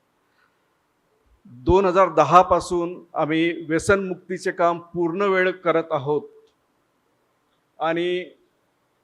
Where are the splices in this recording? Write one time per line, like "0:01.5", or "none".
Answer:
none